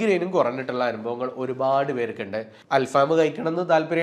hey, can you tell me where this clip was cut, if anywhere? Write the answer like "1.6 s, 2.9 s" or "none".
2.5 s